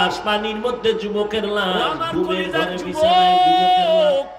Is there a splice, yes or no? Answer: yes